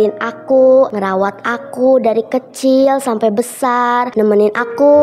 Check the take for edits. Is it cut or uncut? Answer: cut